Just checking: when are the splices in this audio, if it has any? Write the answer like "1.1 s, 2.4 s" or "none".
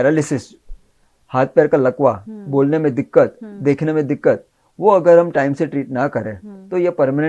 none